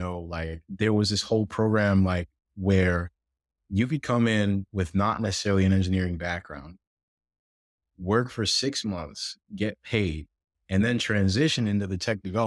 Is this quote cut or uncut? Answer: uncut